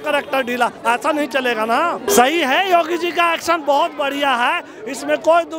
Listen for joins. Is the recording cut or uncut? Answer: cut